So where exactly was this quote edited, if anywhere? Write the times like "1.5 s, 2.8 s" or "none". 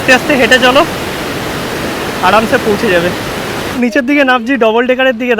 3.7 s